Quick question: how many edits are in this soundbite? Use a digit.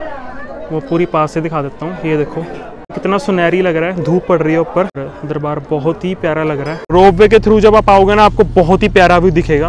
3